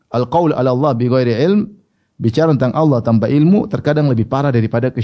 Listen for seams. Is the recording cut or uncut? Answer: uncut